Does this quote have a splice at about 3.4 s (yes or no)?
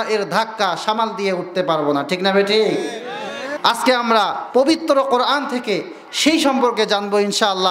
yes